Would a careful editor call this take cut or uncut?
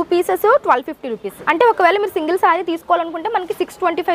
cut